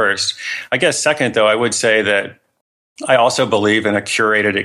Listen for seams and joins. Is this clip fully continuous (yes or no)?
yes